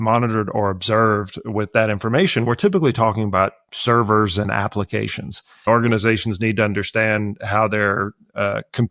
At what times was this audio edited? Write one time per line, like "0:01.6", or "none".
0:05.6